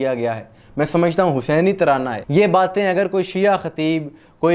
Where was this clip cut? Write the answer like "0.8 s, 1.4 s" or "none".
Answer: 2.2 s